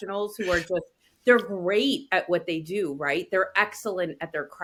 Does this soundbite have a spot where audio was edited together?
no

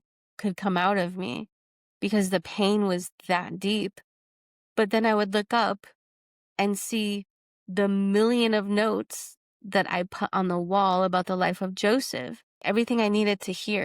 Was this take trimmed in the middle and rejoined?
yes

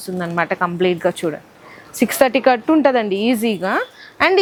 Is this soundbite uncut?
yes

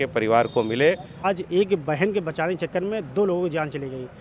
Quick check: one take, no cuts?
no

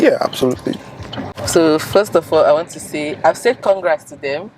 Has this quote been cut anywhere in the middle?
no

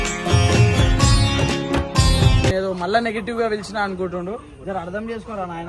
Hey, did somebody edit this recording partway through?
yes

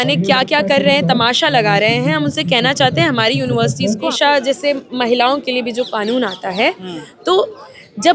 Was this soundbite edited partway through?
yes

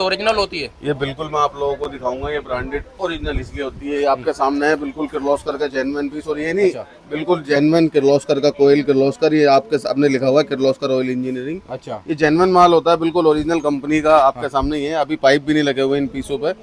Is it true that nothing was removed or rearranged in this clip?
yes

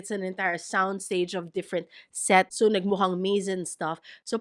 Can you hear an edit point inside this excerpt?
yes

